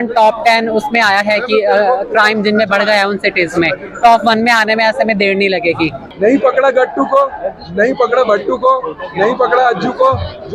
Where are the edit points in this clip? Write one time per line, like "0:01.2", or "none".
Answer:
0:06.0